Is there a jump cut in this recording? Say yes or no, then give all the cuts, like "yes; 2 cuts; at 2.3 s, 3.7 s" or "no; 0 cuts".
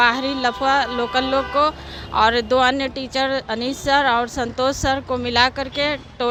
no; 0 cuts